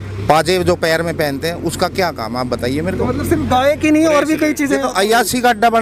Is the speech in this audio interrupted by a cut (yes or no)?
no